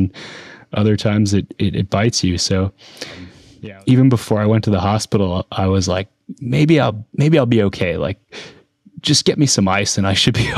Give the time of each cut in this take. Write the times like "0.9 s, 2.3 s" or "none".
3.4 s